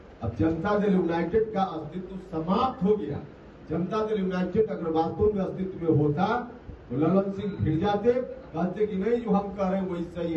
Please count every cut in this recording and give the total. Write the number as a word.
zero